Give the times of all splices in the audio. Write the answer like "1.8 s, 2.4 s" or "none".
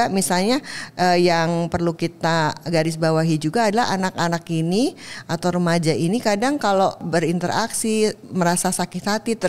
7.0 s